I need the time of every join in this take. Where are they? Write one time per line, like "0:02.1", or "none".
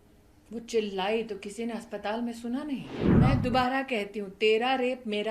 0:03.0